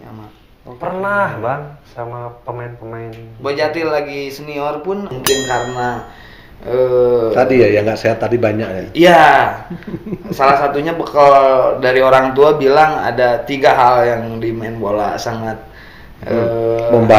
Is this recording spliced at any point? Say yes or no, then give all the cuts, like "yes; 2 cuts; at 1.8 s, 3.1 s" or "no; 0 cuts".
yes; 1 cut; at 5.1 s